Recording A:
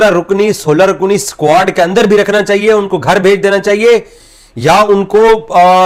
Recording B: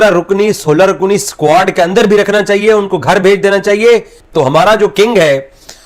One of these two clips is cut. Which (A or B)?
B